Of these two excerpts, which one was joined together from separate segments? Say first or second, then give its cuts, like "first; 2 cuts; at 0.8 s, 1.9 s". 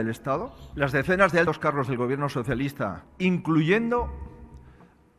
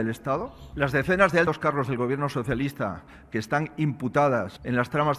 first; 1 cut; at 3.0 s